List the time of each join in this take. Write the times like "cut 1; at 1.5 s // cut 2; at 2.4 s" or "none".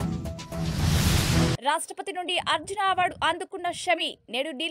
cut 1; at 1.6 s